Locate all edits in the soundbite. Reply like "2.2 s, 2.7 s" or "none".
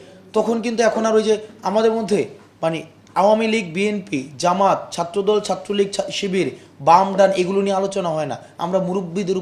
none